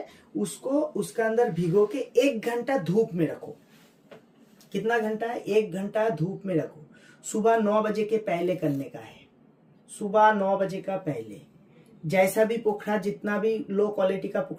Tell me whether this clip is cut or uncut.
uncut